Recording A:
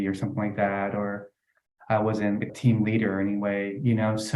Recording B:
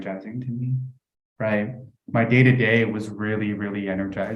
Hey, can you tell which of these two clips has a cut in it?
A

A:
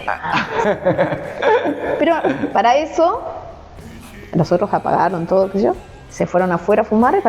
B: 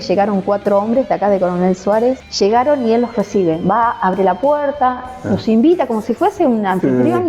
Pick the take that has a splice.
B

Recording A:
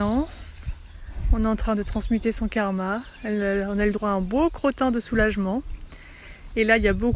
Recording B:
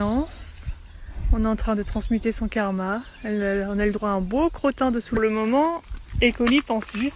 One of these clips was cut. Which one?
B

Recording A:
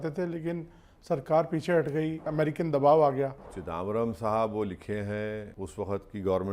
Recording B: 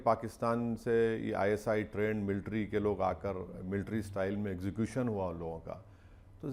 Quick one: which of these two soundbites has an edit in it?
A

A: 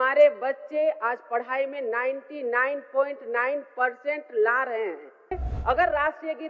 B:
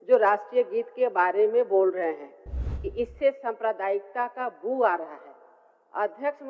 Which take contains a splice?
A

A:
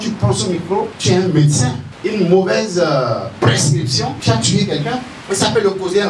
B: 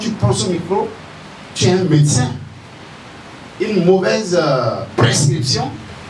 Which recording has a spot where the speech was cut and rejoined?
A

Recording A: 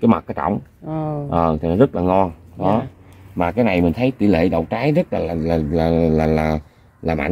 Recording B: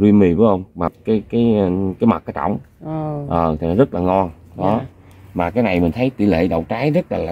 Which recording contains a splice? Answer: B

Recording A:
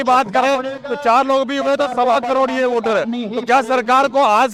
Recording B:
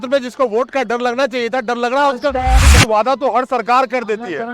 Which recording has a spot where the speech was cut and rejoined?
B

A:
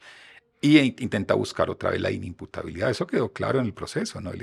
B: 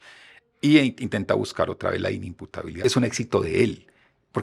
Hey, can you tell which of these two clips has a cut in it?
B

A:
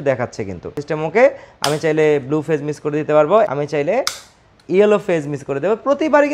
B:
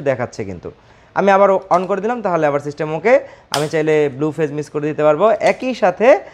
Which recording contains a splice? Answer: A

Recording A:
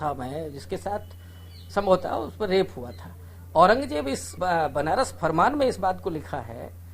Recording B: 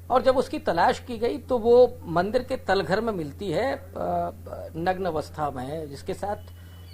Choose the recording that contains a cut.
A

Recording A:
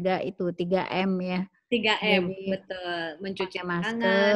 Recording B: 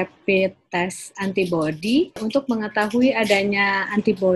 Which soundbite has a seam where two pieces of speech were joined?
B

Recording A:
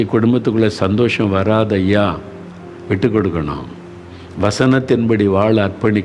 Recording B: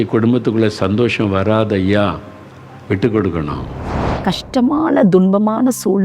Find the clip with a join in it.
B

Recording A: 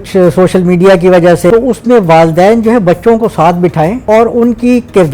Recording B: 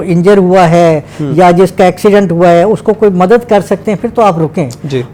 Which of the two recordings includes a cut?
A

